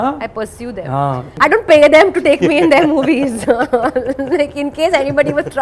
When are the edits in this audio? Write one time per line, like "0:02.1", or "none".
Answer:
0:01.3